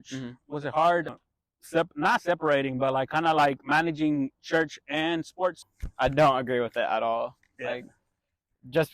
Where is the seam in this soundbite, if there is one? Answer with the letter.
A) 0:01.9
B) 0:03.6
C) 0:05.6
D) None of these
C